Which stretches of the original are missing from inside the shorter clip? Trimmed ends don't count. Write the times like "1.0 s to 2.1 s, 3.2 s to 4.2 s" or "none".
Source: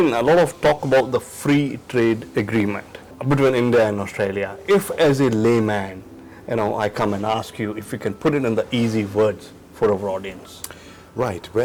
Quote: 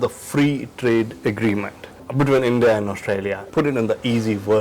4.5 s to 8.1 s

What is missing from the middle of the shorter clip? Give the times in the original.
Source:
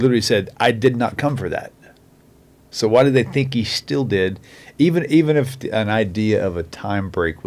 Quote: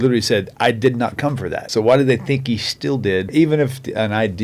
1.6 s to 2.7 s, 4.4 s to 5.1 s

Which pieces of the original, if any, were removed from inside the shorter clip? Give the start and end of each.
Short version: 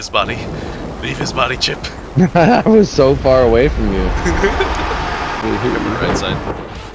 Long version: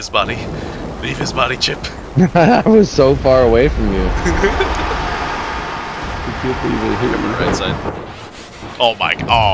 5.4 s to 6.8 s

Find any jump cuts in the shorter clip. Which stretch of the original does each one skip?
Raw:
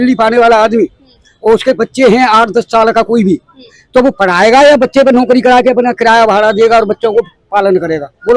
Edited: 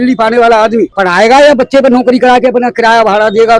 1.0 s to 4.2 s

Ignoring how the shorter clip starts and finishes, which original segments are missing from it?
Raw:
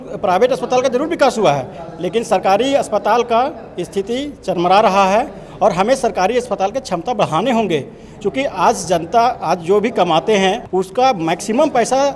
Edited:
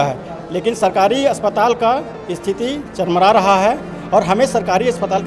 none

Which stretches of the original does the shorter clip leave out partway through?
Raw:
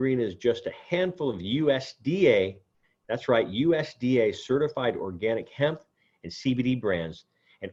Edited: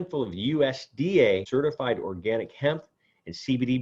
2.5 s to 4.4 s

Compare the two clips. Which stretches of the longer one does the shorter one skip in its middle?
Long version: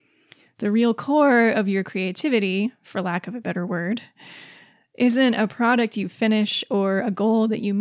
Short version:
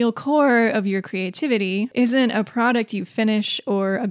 2.7 s to 4.9 s

